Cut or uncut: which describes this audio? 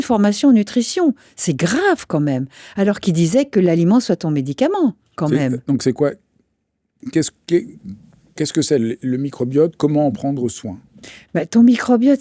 uncut